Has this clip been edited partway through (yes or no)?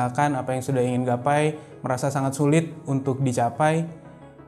no